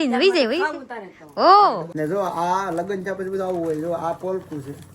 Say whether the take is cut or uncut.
cut